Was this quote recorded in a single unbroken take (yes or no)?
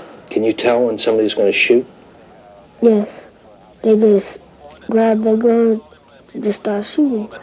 yes